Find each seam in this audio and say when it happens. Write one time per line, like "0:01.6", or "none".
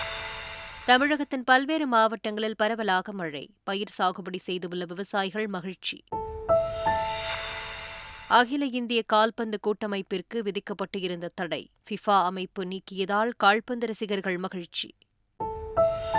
0:15.2